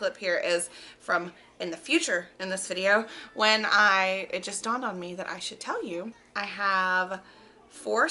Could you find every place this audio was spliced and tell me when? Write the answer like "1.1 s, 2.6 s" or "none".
6.2 s